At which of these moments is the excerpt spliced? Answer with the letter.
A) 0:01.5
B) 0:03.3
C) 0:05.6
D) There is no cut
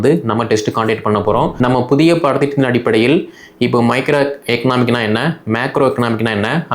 A